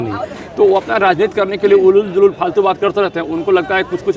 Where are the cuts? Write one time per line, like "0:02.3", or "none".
none